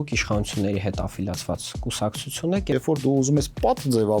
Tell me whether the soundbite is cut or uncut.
cut